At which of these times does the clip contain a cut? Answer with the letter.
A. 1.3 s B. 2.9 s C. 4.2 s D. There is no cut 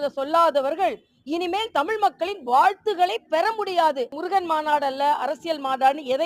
C